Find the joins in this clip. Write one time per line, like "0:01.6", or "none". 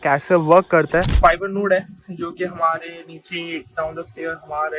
0:01.1